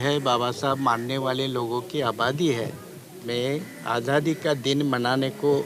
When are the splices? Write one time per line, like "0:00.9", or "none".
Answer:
0:03.3